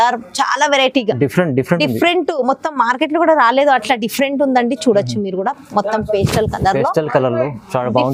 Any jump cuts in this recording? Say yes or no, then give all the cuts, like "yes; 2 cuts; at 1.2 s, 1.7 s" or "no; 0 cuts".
no; 0 cuts